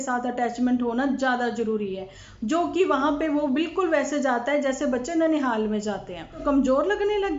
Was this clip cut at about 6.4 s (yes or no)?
yes